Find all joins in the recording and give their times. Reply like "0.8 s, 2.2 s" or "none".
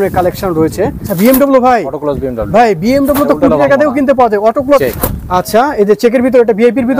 1.0 s, 4.8 s